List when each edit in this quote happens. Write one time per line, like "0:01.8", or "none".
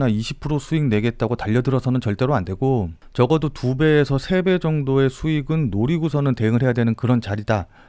0:03.0